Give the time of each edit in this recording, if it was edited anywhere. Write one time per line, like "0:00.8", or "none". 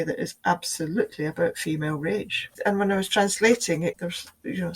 0:02.5